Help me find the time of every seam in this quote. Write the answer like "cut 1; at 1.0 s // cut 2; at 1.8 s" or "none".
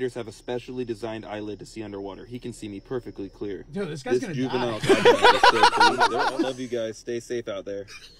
cut 1; at 6.3 s